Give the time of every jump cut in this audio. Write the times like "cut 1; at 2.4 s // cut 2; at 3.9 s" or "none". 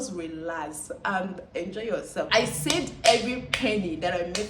cut 1; at 2.2 s

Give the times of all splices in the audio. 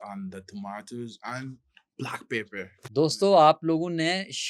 none

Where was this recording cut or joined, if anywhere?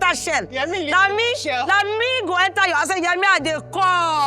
none

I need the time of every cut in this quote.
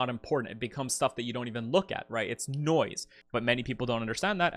cut 1; at 3.2 s

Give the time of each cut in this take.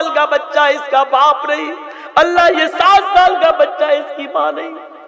none

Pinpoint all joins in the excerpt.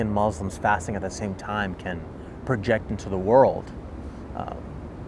none

